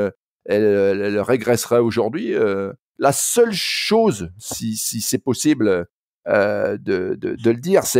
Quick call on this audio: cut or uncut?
cut